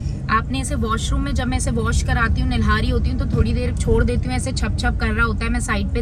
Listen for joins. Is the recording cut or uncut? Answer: uncut